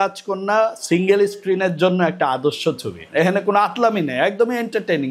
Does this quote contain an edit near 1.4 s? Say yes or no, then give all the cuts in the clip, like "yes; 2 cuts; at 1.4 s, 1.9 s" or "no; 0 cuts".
no; 1 cut; at 3.0 s